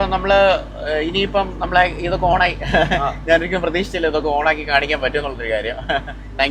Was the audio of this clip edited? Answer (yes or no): no